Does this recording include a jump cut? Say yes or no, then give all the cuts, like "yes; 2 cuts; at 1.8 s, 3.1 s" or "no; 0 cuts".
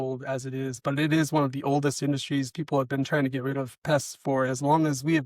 no; 0 cuts